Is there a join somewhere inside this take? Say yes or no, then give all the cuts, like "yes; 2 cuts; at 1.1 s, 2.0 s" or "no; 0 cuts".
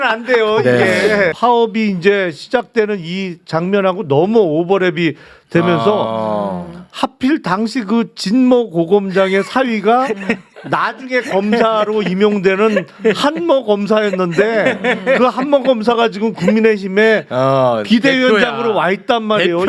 yes; 1 cut; at 1.3 s